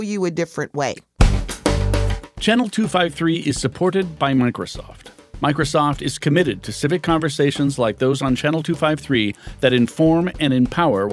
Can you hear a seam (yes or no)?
yes